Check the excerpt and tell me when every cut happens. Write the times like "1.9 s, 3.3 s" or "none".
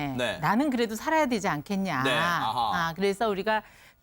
2.9 s